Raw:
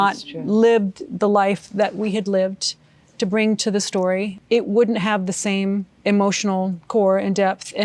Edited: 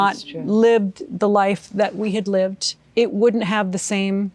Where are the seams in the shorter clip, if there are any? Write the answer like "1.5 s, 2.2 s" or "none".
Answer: 2.8 s